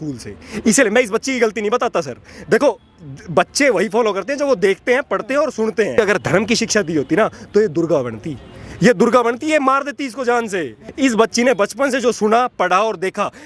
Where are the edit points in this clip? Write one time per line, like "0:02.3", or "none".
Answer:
0:06.0
0:10.8